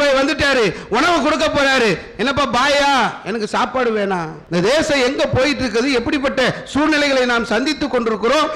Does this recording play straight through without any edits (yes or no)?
no